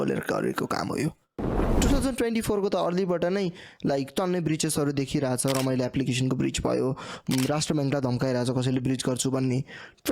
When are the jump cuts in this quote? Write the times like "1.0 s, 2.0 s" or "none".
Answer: 1.6 s